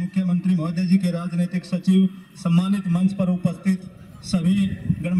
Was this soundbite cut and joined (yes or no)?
no